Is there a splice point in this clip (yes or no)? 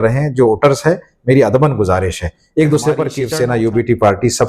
yes